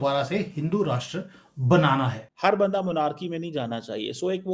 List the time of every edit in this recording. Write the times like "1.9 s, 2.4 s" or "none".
2.3 s

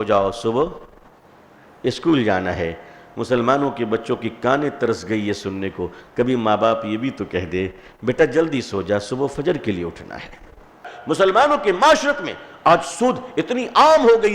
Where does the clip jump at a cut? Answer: 10.9 s

